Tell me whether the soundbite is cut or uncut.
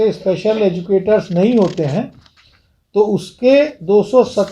uncut